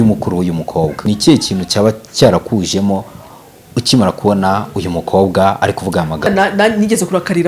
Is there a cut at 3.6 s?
no; 2 cuts; at 1.1 s, 6.2 s

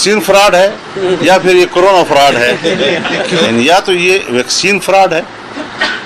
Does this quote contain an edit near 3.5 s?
yes; 1 cut; at 3.5 s

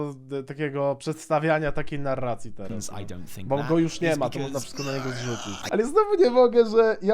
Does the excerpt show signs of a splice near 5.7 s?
yes; 1 cut; at 5.7 s

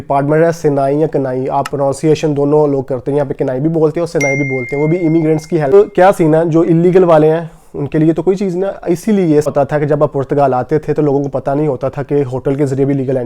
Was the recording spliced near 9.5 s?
yes; 2 cuts; at 5.7 s, 9.5 s

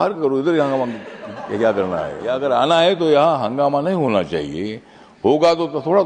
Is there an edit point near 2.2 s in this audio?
yes; 1 cut; at 2.2 s

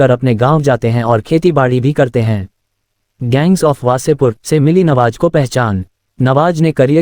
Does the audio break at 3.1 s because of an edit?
yes; 1 cut; at 3.1 s

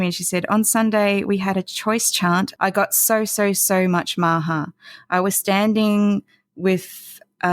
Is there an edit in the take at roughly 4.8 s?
no; 1 cut; at 2.5 s

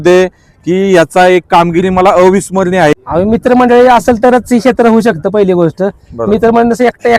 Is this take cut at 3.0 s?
yes; 1 cut; at 3.0 s

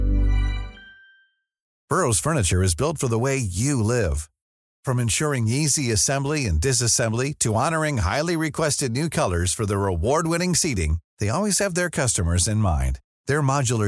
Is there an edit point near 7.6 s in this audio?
no; 1 cut; at 1.8 s

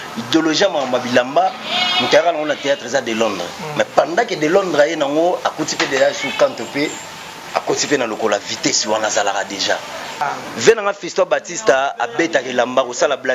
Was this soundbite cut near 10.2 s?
yes; 1 cut; at 10.2 s

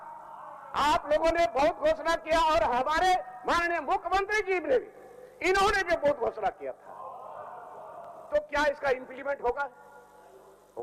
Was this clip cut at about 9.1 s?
no; 0 cuts

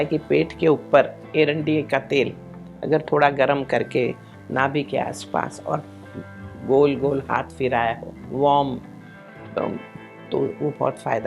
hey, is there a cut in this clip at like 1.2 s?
yes; 1 cut; at 1.2 s

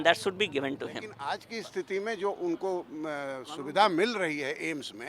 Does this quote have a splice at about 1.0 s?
yes; 1 cut; at 1.0 s

